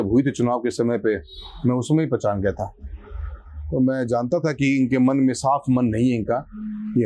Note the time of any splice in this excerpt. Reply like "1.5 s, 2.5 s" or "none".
none